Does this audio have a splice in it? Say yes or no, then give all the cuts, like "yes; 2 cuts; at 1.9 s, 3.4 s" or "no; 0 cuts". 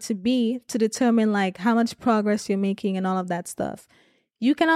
no; 0 cuts